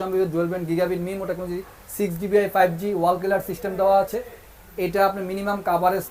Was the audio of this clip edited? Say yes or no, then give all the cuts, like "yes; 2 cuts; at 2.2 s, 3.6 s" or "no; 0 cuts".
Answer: no; 0 cuts